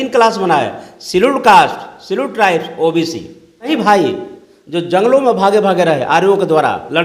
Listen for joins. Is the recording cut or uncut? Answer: cut